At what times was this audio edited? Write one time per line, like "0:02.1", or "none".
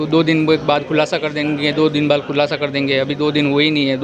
none

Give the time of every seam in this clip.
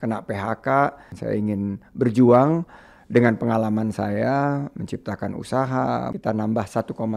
0:01.1
0:06.1

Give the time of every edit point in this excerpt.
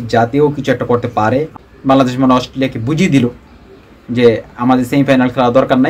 0:01.5

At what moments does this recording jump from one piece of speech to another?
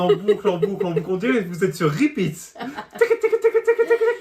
none

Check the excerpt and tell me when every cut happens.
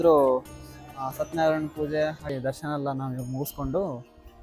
0:02.3

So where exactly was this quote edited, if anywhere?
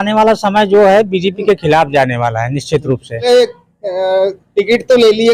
0:03.2

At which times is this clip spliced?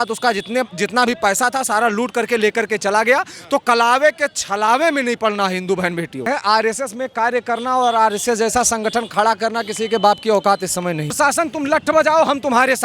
0:06.3
0:11.1

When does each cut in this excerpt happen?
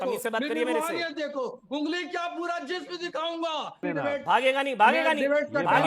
0:03.8

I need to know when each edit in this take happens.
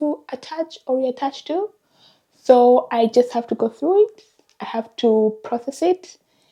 none

